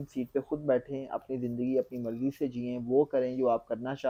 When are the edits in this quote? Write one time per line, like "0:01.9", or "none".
none